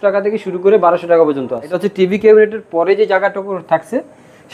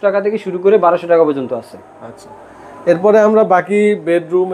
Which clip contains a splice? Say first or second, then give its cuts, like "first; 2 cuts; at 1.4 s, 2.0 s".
first; 1 cut; at 1.8 s